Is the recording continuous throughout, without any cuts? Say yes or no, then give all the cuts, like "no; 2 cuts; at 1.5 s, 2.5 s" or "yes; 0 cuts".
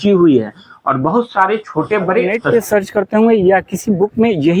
no; 1 cut; at 2.4 s